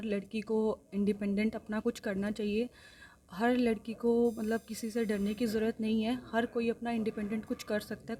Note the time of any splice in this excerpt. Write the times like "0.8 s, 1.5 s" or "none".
none